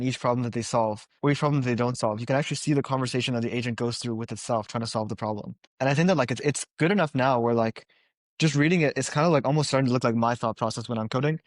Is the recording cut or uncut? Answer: cut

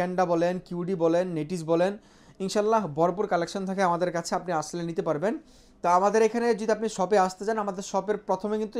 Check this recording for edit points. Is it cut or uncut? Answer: uncut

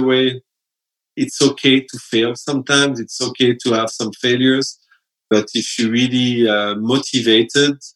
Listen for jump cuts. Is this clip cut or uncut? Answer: uncut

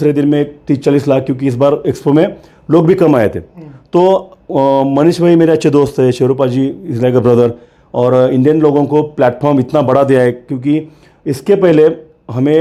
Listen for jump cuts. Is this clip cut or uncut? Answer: uncut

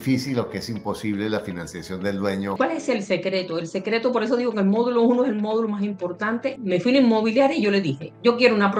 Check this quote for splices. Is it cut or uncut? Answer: cut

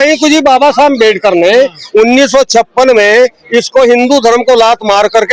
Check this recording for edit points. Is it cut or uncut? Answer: uncut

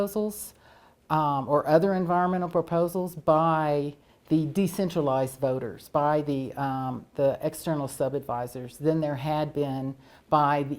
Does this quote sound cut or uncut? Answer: uncut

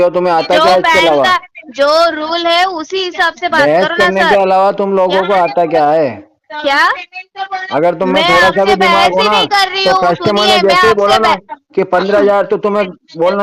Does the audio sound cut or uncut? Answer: uncut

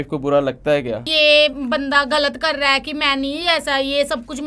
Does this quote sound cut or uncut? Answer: cut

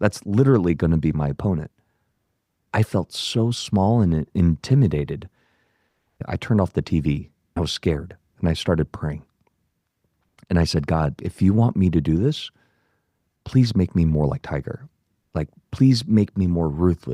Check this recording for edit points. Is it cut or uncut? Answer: cut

